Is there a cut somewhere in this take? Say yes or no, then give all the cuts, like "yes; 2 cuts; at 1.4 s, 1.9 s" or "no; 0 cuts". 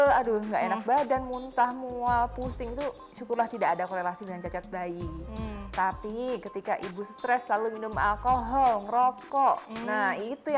no; 0 cuts